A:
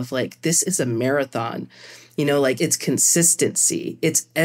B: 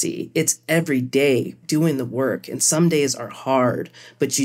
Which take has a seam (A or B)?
A